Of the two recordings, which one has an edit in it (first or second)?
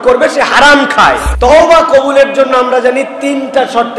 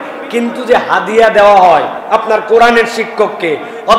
first